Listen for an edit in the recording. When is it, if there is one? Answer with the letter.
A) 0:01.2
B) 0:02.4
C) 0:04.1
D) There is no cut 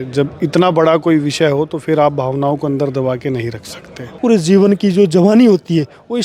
C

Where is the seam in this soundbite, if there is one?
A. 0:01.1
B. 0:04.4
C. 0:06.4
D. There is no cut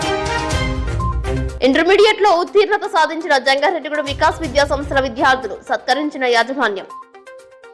A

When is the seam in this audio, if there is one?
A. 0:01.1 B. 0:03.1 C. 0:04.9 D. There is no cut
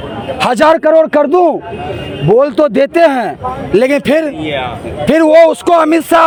D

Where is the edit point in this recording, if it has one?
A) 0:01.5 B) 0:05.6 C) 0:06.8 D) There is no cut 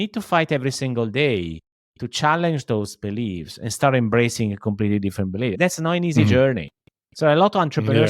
B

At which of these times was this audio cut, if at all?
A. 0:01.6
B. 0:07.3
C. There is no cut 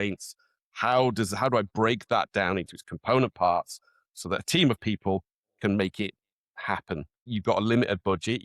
B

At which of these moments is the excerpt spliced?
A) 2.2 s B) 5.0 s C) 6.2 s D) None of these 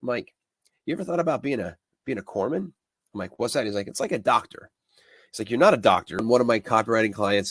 C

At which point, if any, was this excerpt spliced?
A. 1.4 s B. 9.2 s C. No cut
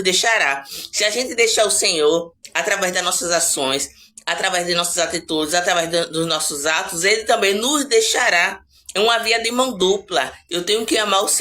B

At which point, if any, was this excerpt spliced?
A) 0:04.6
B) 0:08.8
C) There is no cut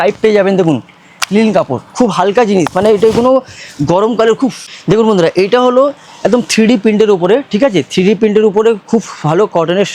A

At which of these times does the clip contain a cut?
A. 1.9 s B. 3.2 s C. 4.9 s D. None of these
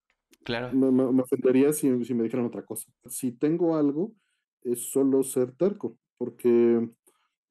B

